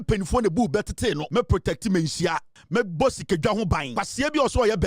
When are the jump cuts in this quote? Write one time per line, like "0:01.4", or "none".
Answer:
0:01.2
0:02.5
0:03.9